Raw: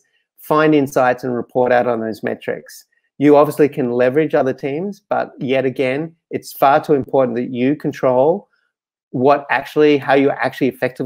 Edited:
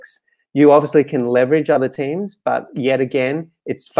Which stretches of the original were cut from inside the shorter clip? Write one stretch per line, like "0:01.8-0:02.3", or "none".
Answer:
none